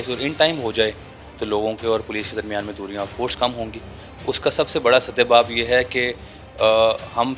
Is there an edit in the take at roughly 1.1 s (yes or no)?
no